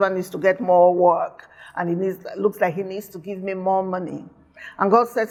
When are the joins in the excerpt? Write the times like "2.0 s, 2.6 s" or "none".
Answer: none